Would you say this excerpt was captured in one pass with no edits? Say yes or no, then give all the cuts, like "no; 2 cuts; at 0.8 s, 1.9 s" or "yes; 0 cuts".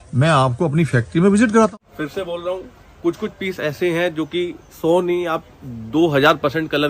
no; 1 cut; at 1.7 s